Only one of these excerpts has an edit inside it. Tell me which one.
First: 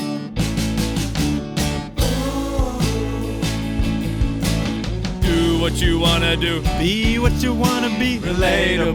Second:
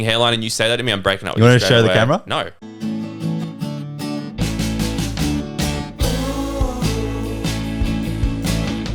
second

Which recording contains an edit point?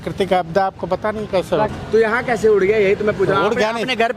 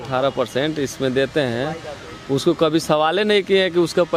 first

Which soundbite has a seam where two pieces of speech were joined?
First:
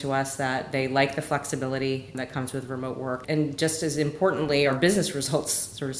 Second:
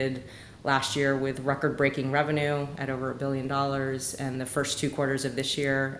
first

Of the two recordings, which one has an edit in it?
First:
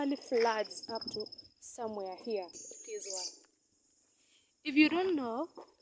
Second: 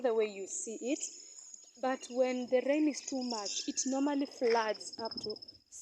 first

